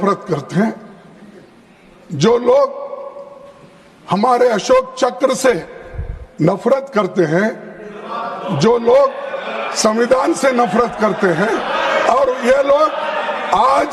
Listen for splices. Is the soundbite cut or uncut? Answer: uncut